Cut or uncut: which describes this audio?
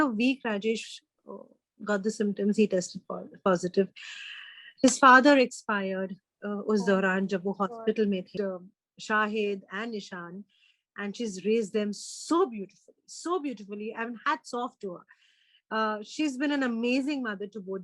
cut